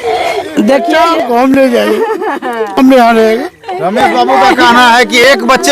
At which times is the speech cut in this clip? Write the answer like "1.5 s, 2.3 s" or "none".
1.1 s